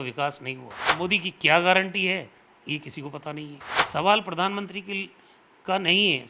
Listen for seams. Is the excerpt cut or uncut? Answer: cut